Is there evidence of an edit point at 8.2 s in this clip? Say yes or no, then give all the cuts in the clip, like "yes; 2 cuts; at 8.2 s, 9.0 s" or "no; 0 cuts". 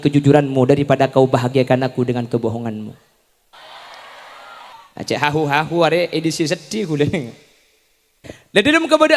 no; 1 cut; at 4.7 s